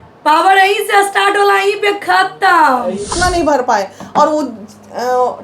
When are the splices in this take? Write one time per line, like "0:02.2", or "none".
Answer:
0:03.1